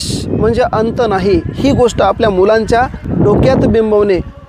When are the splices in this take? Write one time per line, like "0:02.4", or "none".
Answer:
0:03.0